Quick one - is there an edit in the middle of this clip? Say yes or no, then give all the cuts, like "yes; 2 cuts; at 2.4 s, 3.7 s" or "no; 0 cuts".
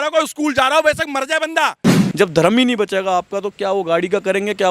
yes; 1 cut; at 2.0 s